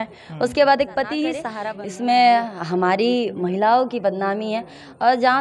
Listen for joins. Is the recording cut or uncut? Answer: cut